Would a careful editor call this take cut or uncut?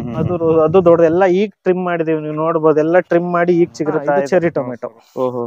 cut